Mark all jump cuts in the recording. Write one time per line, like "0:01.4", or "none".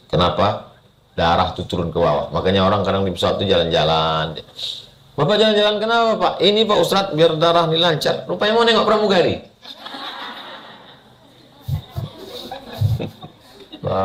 none